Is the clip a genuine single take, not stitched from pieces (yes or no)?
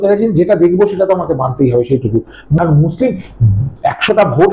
no